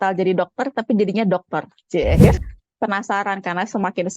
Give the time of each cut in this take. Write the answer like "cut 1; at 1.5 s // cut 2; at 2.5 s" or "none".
cut 1; at 2.4 s